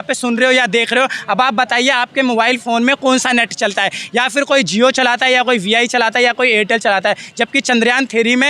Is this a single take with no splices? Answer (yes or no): yes